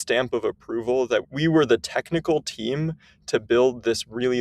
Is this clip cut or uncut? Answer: cut